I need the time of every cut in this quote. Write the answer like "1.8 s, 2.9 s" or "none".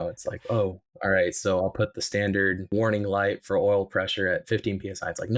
2.7 s